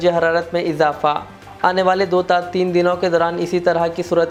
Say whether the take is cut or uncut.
uncut